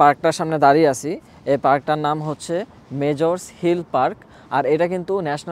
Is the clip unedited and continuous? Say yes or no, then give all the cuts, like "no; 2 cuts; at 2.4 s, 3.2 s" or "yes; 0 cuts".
yes; 0 cuts